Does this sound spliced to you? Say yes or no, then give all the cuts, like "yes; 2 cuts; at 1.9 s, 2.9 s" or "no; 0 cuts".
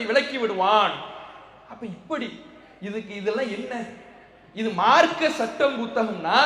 no; 0 cuts